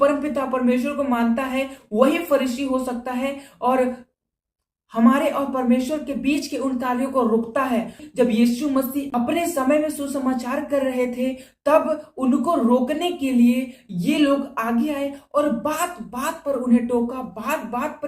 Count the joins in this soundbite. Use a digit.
1